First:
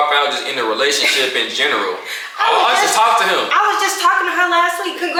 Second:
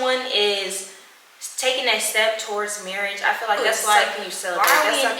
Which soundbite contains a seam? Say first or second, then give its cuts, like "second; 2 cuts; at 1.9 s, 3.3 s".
second; 1 cut; at 3.6 s